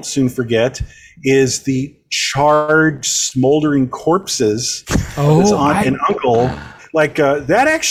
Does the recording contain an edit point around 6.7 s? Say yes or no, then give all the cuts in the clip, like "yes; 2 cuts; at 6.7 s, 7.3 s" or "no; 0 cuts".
yes; 1 cut; at 6.7 s